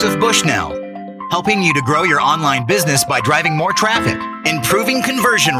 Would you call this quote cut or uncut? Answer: uncut